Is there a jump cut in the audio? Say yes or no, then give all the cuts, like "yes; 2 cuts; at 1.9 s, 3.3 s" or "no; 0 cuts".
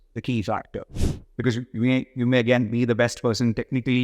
yes; 1 cut; at 0.9 s